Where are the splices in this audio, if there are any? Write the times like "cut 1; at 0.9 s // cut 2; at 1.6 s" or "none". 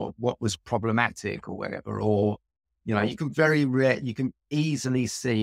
none